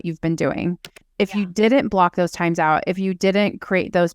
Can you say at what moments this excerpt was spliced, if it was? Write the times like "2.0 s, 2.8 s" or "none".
1.1 s